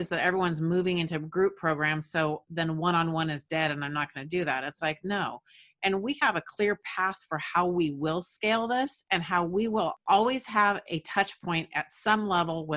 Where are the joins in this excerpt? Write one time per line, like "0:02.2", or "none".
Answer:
0:10.0